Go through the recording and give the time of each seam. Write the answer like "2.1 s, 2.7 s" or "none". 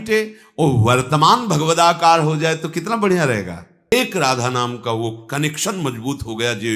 3.9 s